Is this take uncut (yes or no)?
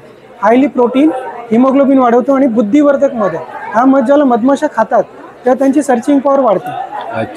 yes